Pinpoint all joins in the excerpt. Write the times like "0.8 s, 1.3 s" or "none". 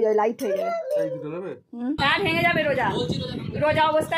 2.0 s